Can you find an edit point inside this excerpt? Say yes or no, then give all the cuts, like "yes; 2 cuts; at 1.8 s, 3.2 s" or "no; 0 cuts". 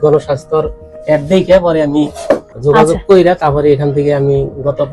yes; 1 cut; at 2.5 s